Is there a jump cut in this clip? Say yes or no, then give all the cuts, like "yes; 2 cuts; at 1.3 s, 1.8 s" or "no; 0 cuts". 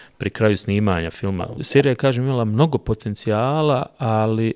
yes; 1 cut; at 1.6 s